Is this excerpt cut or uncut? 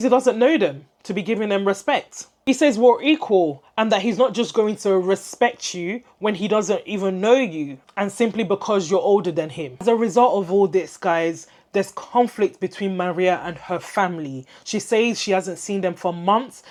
uncut